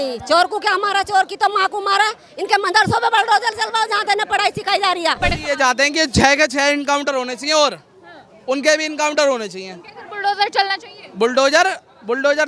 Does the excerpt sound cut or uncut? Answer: cut